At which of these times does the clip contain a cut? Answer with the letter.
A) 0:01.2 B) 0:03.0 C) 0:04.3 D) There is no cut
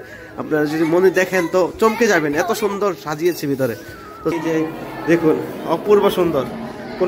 C